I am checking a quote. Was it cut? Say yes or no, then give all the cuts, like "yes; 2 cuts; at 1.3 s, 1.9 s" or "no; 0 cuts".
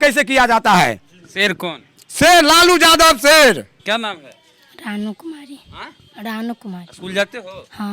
no; 0 cuts